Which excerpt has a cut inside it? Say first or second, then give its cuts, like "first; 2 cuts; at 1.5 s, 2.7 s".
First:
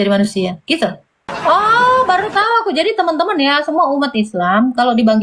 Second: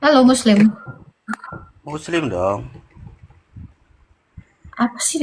first; 1 cut; at 1.2 s